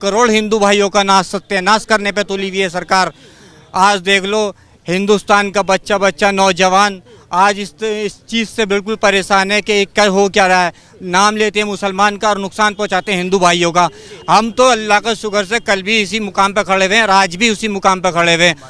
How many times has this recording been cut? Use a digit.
0